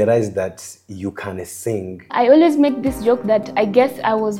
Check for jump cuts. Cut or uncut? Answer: uncut